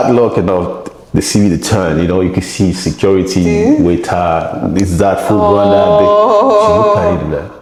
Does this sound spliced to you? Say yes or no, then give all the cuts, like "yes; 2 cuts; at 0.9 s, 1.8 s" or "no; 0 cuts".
no; 0 cuts